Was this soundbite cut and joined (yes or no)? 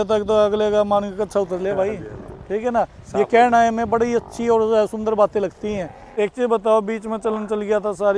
yes